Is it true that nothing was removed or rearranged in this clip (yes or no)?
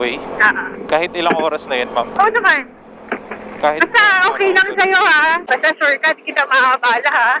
yes